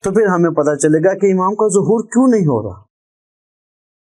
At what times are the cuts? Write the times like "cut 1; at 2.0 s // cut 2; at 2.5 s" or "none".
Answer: none